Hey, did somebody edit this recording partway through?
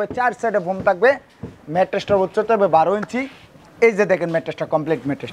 no; 0 cuts

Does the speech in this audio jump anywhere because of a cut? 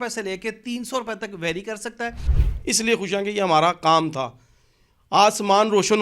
yes; 1 cut; at 2.3 s

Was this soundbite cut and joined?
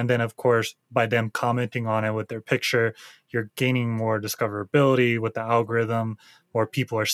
no; 0 cuts

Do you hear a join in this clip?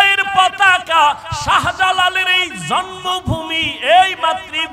no; 0 cuts

